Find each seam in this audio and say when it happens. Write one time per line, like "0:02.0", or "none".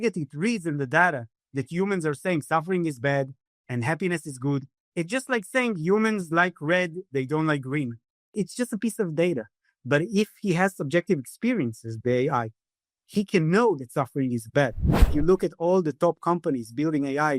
0:08.3
0:15.0